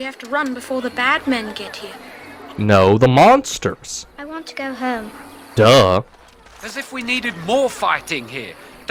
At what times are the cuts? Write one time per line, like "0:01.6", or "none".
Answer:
none